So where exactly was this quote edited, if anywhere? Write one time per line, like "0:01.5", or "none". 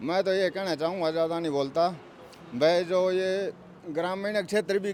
none